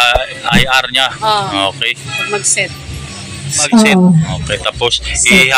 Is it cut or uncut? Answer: cut